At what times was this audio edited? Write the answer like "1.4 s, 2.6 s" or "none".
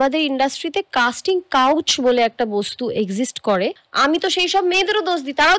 3.8 s